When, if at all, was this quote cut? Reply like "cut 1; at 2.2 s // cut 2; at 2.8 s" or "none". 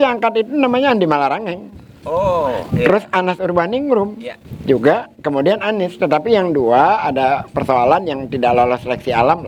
none